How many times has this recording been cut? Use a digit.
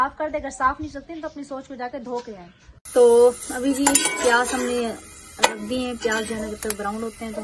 0